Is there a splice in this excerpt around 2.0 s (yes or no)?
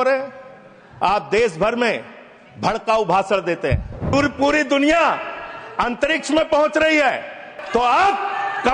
no